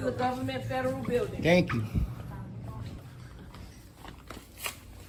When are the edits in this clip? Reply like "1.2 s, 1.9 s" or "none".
none

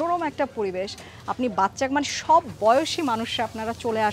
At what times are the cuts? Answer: none

